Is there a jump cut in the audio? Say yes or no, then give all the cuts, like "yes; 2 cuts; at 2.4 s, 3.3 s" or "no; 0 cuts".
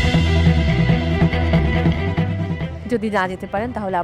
yes; 1 cut; at 2.7 s